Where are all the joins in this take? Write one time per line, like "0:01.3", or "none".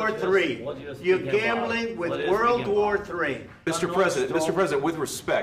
0:03.5